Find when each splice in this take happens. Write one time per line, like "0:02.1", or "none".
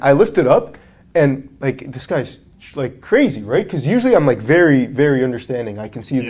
none

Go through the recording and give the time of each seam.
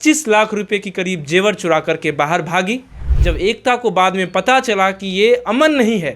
0:03.1

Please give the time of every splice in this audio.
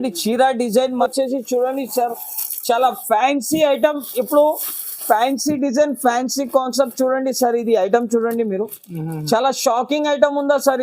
0:01.0

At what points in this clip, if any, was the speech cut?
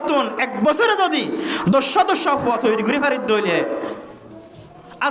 none

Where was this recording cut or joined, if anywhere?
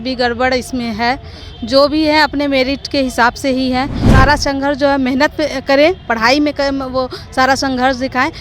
0:04.0

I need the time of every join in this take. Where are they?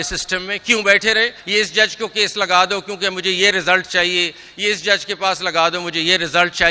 0:01.4

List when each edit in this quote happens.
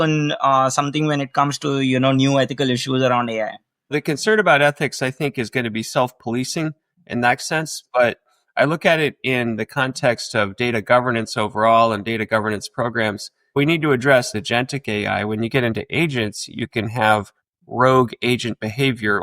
0:04.0
0:13.5
0:14.3

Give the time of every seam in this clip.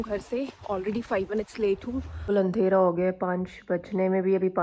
0:02.2

